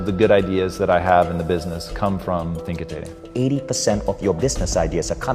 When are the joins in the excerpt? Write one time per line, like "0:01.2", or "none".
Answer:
0:03.2